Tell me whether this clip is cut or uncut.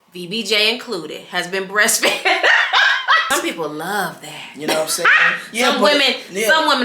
cut